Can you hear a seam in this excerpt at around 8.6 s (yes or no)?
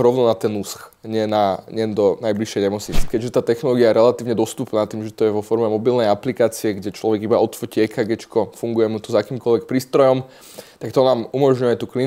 no